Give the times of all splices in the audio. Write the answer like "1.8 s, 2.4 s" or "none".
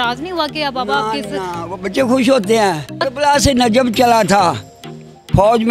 3.1 s